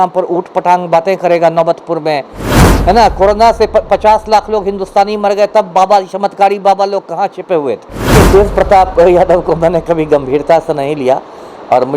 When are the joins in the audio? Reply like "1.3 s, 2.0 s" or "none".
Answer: 2.7 s, 8.2 s